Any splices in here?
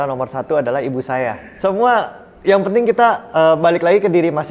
yes; 1 cut; at 1.5 s

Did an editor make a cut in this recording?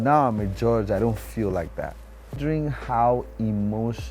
yes; 1 cut; at 2.4 s

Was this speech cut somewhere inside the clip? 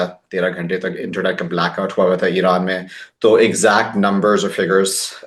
no; 0 cuts

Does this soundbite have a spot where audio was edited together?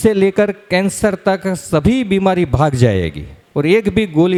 no; 0 cuts

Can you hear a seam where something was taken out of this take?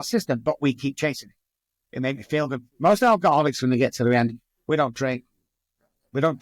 no; 0 cuts

